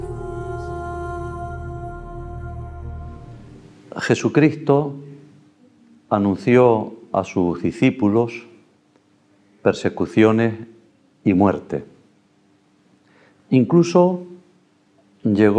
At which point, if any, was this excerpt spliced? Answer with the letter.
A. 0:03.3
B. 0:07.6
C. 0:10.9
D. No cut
D